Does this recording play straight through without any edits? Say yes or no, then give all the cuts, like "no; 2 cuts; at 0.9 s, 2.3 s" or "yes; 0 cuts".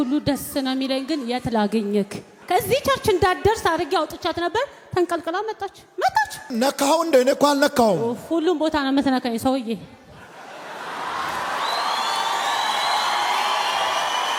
yes; 0 cuts